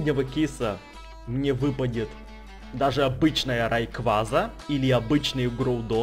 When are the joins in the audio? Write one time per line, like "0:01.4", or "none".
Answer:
0:04.6